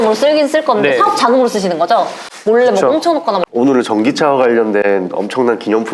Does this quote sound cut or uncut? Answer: cut